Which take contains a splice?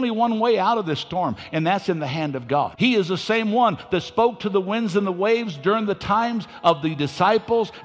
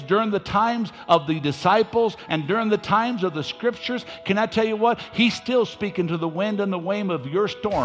first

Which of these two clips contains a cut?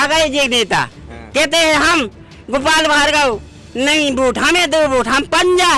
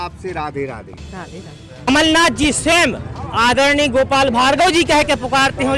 second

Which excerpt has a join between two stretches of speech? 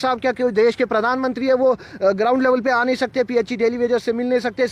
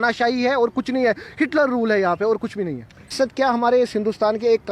second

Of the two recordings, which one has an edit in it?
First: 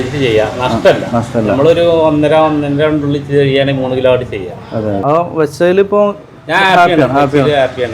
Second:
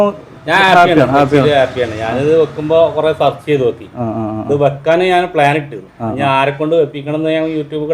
first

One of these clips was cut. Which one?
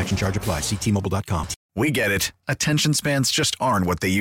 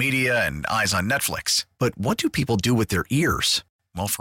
first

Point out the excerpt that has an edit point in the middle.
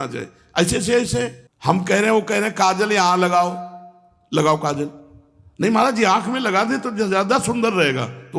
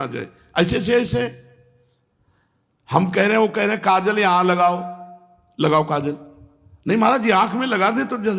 first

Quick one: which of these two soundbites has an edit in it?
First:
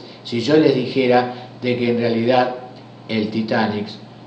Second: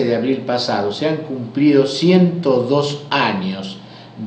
second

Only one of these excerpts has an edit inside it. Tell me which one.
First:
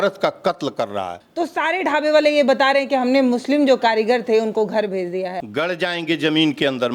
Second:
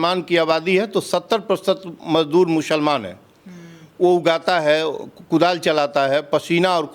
first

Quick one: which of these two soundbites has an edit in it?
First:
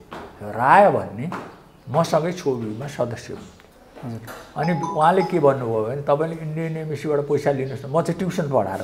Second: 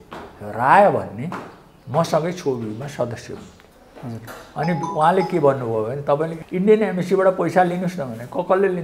second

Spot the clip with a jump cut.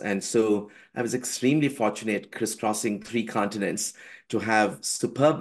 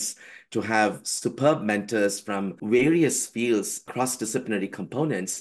second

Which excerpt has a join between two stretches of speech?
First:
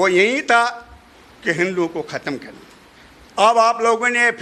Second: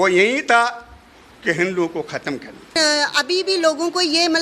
second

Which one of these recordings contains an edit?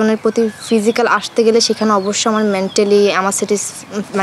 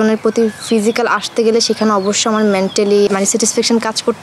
second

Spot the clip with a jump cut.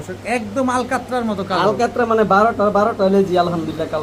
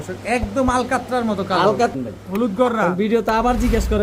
second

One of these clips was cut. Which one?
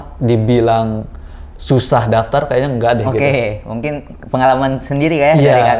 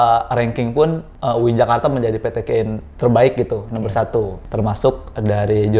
second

